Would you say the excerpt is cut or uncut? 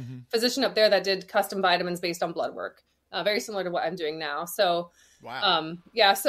uncut